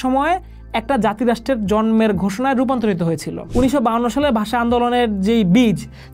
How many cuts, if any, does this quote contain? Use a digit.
1